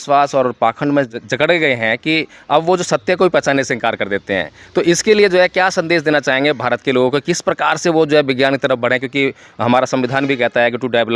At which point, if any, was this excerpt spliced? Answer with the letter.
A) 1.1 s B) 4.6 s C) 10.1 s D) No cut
A